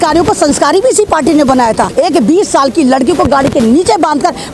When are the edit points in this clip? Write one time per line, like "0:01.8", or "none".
0:01.9